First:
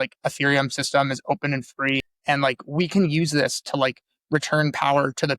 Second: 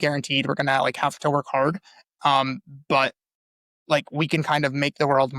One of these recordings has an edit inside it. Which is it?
first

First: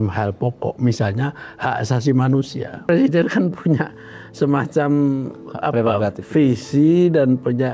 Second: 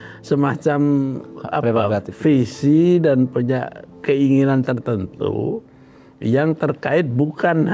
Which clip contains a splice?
first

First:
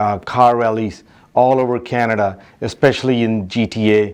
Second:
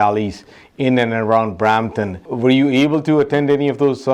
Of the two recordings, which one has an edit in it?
second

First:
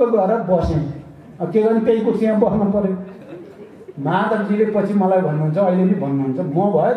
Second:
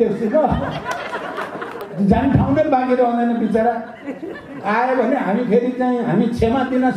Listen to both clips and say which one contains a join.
second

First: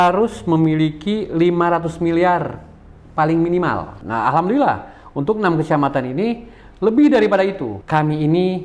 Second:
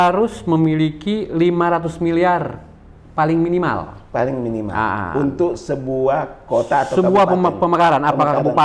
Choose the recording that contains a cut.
first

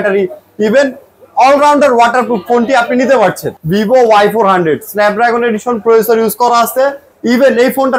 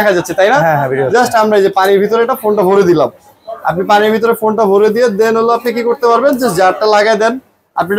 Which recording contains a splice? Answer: first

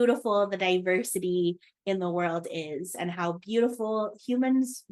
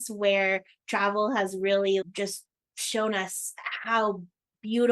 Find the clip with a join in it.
second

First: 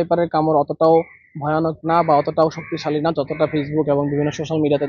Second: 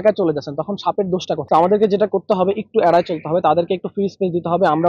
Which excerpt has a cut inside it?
second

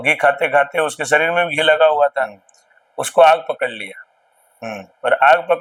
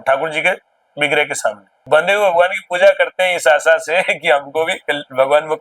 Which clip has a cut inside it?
second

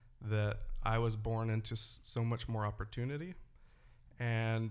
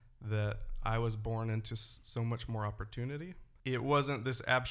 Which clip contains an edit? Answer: second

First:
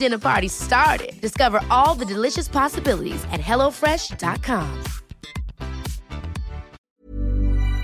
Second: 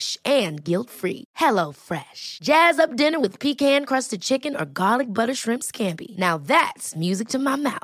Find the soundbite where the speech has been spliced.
first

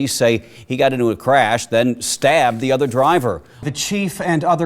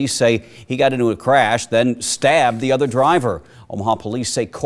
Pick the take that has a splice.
first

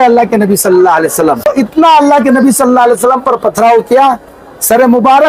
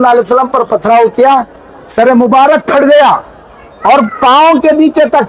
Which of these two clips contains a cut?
first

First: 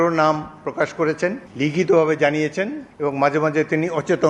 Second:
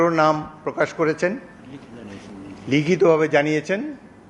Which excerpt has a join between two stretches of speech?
first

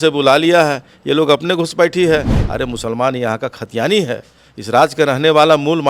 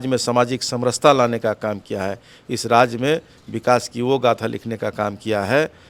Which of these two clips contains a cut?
first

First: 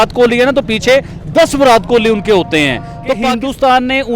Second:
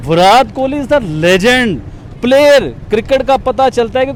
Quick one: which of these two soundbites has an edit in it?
first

